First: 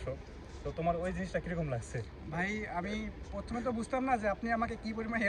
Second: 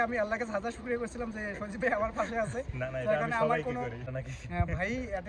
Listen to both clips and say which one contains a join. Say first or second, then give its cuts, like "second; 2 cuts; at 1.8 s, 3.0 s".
second; 1 cut; at 4.1 s